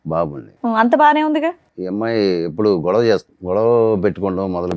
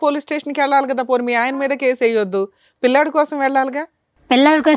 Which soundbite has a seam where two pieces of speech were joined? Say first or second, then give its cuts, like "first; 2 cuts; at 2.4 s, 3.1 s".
first; 2 cuts; at 1.7 s, 3.3 s